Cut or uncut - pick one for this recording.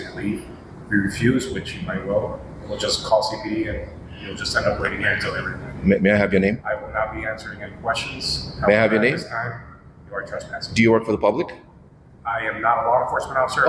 uncut